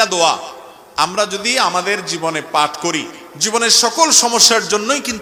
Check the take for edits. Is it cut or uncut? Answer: uncut